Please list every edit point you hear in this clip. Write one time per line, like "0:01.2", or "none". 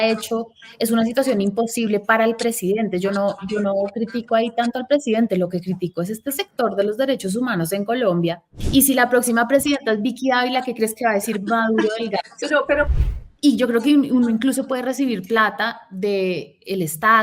0:08.6
0:12.9